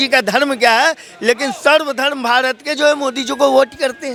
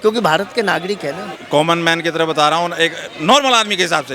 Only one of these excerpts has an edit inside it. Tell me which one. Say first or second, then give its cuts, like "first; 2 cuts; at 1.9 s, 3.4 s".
second; 1 cut; at 1.4 s